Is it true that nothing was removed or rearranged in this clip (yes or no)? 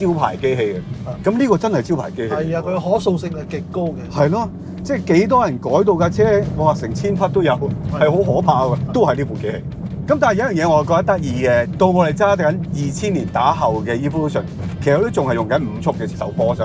yes